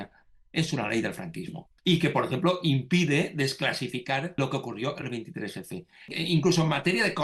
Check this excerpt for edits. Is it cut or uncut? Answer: cut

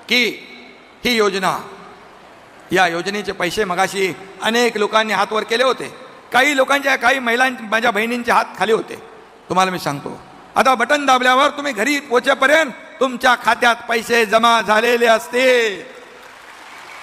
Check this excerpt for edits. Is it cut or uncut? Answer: uncut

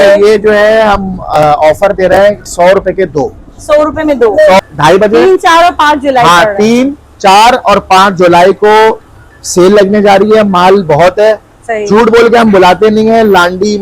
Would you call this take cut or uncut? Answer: cut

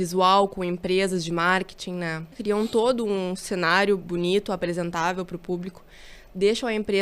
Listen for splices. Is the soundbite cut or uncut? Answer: cut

